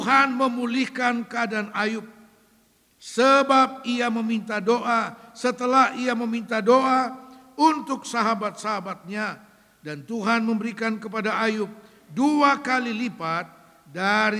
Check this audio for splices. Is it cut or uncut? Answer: uncut